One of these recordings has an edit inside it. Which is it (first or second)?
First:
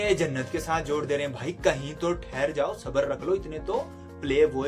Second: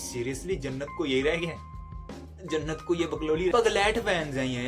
second